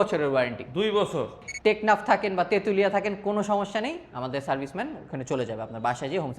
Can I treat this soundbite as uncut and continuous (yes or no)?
no